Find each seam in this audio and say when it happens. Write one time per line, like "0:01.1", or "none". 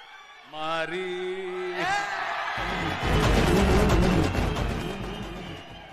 none